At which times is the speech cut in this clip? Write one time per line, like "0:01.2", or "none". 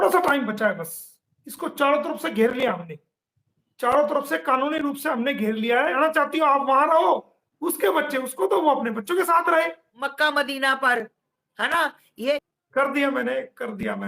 0:05.9
0:10.2
0:12.4